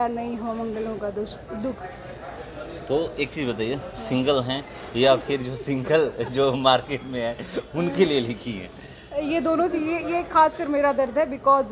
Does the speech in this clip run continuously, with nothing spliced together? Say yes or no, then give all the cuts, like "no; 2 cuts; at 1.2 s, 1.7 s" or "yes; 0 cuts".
yes; 0 cuts